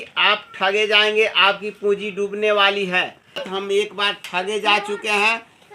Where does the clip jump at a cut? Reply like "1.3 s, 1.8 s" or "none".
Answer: 3.4 s